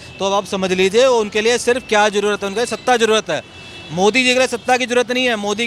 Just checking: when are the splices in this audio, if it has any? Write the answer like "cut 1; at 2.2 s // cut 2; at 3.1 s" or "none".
none